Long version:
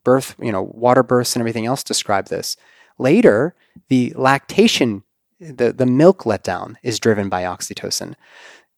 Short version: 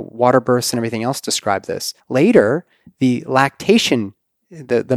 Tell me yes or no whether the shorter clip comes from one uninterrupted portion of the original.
no